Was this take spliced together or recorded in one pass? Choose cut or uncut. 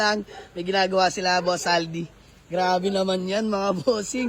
uncut